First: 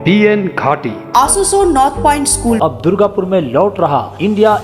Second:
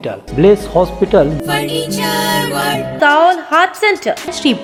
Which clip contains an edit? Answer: first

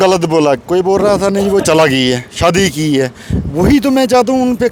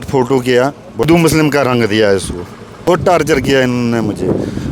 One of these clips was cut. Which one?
second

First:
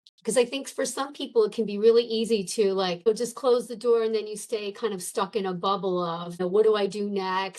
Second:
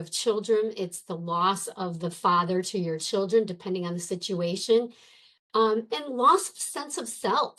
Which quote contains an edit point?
first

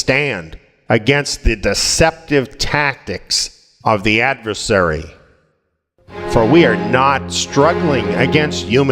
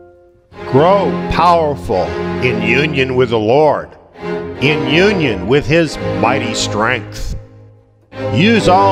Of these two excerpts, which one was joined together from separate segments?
first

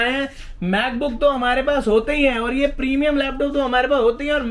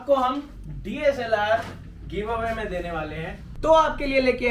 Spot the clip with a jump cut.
second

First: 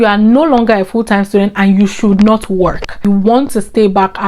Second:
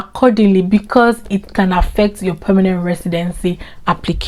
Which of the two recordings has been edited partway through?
first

